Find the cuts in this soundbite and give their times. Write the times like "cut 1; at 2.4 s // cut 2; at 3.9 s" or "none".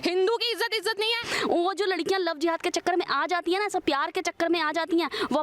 cut 1; at 1.2 s